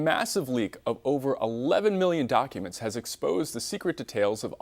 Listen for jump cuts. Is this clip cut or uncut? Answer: uncut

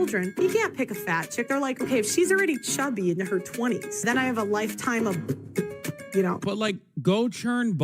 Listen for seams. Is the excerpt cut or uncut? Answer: cut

